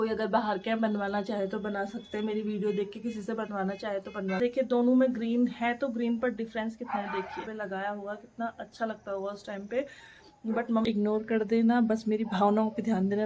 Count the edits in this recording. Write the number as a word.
three